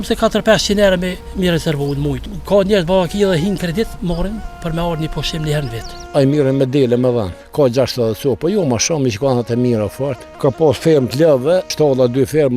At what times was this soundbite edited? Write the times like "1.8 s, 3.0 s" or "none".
1.2 s, 2.3 s, 6.0 s, 7.4 s, 10.2 s, 11.7 s